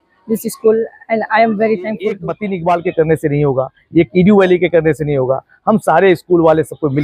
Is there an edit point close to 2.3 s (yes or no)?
yes